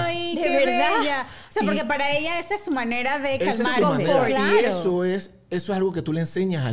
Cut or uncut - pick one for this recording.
uncut